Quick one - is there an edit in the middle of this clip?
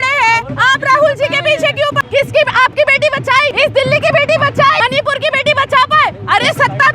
yes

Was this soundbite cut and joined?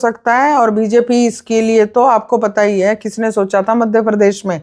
no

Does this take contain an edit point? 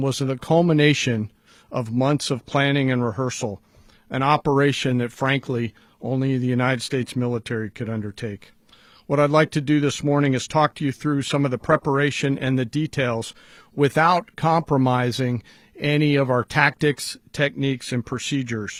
no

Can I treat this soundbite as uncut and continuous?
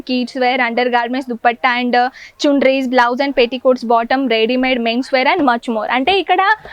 yes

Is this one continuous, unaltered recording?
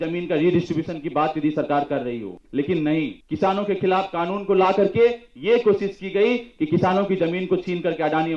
no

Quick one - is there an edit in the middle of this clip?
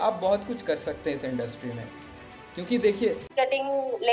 yes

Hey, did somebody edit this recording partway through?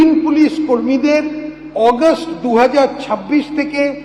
no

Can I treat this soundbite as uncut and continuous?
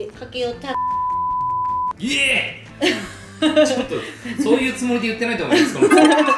yes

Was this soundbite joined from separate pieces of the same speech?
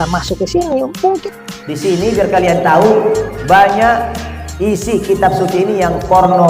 yes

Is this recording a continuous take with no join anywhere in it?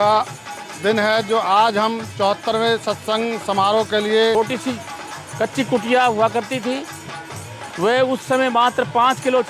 no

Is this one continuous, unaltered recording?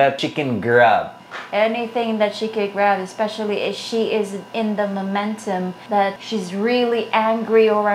yes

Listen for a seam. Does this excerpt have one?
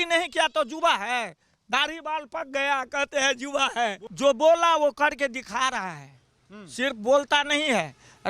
yes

